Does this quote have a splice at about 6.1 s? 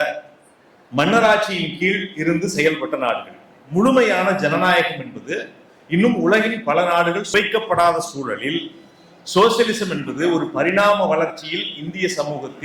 no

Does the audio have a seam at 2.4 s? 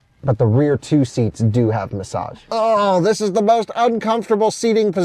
yes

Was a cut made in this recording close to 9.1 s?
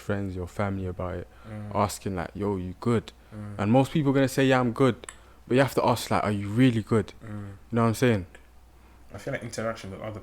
yes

